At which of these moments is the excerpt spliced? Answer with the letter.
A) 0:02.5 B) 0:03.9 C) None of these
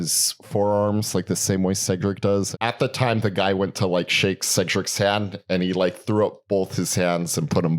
A